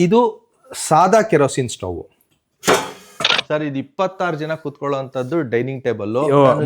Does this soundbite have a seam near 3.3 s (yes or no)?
yes